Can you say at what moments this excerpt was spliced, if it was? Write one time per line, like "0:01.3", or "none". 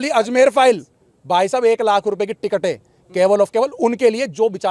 none